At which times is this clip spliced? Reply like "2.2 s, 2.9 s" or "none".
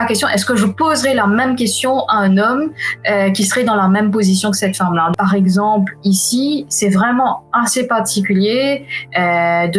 5.1 s